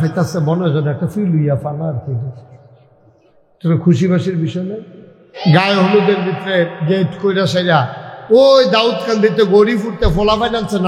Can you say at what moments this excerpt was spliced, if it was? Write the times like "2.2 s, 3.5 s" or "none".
5.4 s